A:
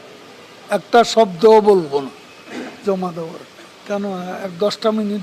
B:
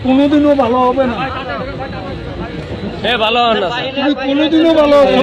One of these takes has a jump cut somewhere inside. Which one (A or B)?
A